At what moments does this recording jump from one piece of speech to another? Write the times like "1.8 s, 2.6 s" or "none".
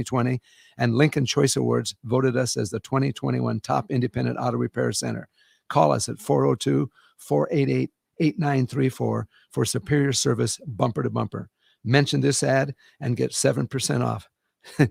none